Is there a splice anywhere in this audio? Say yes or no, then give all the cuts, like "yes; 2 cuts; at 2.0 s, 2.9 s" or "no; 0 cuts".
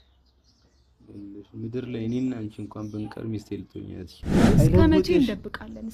yes; 1 cut; at 4.4 s